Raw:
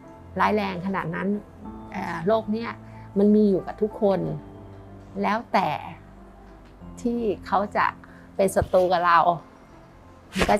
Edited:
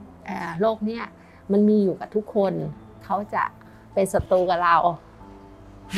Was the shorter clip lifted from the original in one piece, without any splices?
no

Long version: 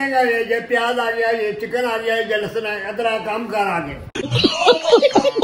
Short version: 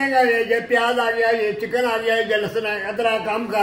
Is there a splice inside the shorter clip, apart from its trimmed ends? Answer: no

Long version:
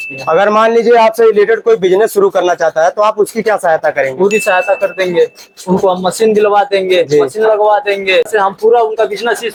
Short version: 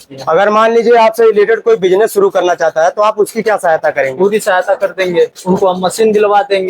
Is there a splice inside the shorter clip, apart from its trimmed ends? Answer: yes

